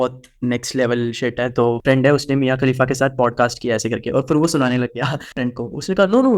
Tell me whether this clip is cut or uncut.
cut